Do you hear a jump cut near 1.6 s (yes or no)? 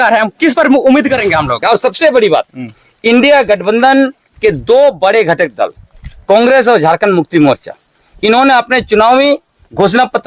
yes